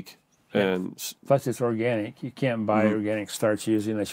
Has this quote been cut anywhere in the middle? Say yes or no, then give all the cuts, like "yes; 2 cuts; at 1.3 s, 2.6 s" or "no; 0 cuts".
no; 0 cuts